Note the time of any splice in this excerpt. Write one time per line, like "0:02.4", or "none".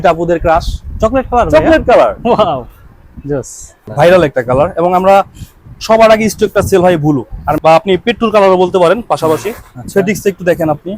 0:03.8
0:07.6
0:09.7